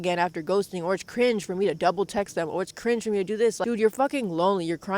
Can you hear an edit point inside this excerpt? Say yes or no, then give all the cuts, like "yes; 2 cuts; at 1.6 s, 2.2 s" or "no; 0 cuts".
no; 0 cuts